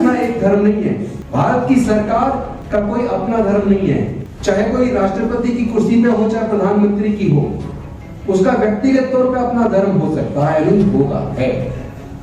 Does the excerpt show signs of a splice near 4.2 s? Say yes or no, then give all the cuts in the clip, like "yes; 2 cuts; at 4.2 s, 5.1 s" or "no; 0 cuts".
yes; 3 cuts; at 1.2 s, 2.5 s, 4.2 s